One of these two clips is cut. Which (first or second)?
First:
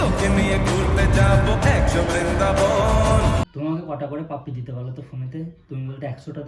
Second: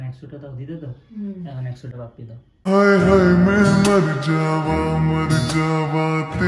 first